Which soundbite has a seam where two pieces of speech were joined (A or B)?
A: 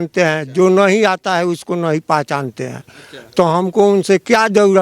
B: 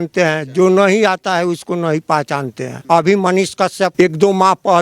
B